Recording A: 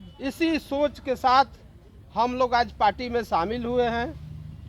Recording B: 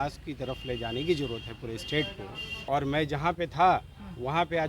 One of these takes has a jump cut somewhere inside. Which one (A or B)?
B